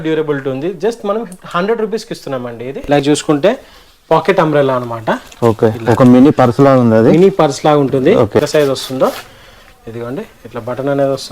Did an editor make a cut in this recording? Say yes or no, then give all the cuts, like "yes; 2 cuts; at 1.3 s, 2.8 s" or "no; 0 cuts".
yes; 2 cuts; at 3.0 s, 8.4 s